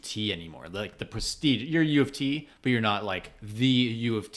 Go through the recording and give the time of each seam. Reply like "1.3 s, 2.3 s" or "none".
none